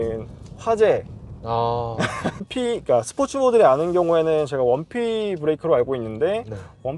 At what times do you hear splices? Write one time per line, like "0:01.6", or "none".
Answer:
0:02.4